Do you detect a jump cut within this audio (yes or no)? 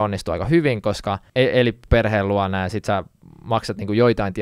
yes